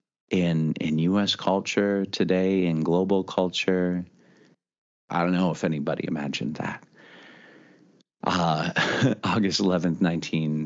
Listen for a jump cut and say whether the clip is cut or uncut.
uncut